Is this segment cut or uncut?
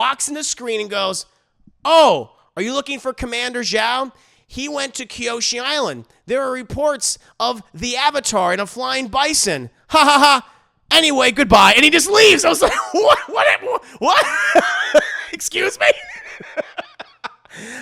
uncut